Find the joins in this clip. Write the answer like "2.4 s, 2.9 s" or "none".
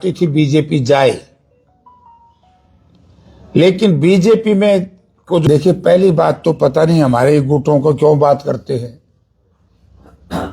5.4 s